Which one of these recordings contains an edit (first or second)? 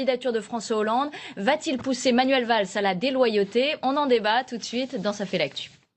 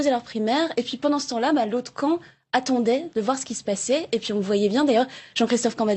second